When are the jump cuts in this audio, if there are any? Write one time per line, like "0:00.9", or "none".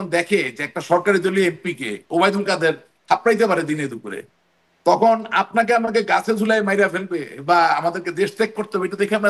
none